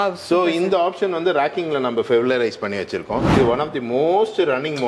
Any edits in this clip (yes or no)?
yes